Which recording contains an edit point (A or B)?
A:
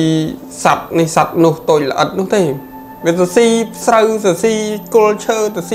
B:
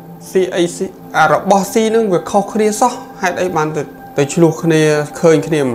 B